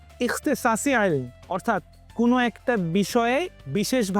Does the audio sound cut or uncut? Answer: uncut